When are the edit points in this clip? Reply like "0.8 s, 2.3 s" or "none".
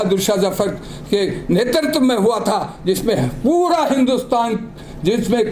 none